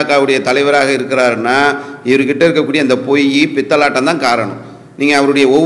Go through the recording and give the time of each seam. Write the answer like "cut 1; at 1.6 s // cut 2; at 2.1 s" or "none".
none